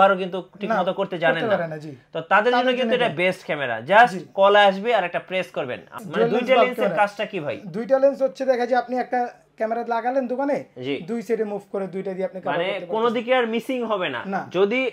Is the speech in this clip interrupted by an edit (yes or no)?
yes